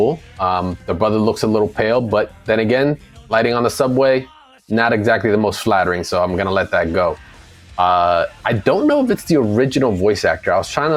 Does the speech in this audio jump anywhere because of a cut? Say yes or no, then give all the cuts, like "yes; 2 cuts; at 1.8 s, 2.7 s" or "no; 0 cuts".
no; 0 cuts